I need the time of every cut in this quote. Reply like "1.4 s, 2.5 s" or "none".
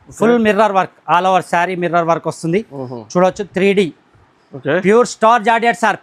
none

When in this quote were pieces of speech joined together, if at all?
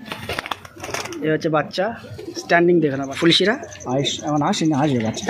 3.1 s

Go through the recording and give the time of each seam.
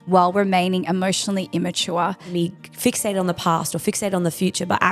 2.3 s

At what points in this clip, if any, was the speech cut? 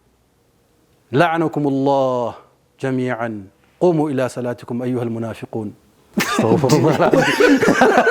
none

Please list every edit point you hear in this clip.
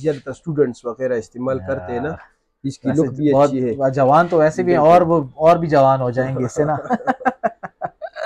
none

